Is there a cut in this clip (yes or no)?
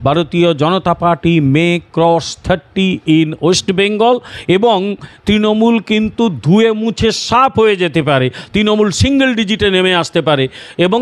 no